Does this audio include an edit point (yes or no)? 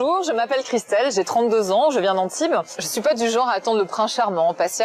yes